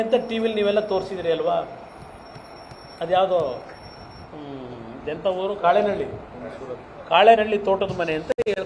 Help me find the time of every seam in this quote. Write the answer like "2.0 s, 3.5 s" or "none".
4.8 s